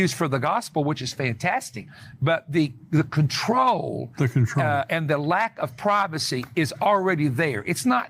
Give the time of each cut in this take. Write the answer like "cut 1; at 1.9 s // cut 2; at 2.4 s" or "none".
none